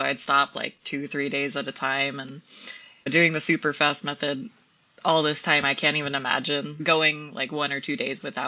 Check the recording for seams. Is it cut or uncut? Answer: cut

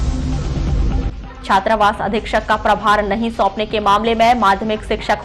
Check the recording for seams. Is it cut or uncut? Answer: cut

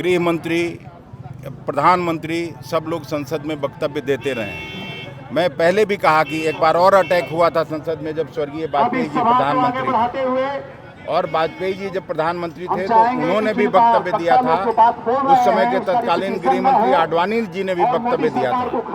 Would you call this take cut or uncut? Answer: uncut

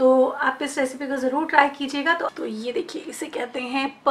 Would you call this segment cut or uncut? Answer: cut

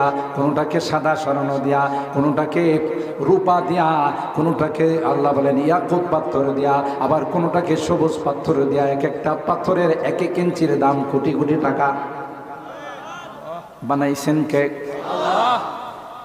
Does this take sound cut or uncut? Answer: uncut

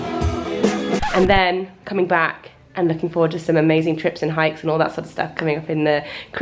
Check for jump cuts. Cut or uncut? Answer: uncut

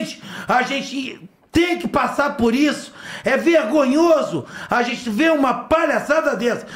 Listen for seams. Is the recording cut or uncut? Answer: uncut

